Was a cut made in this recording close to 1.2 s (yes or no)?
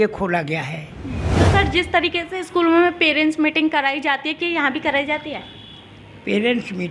yes